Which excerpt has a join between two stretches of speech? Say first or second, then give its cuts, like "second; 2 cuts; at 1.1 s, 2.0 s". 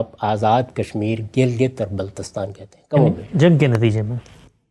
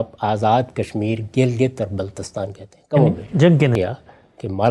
second; 1 cut; at 3.7 s